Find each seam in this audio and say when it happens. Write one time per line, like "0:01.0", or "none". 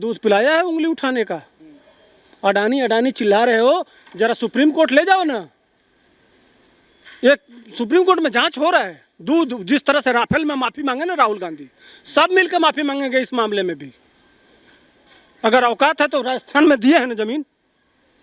none